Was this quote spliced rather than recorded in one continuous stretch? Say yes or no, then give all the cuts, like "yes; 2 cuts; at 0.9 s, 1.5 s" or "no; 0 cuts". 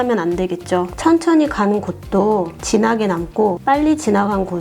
yes; 3 cuts; at 0.9 s, 2.6 s, 3.6 s